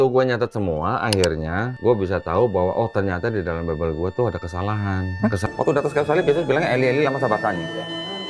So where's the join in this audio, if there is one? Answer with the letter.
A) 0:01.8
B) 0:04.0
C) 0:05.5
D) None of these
C